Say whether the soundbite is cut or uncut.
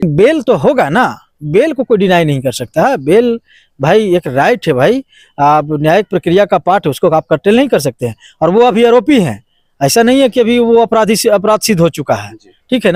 uncut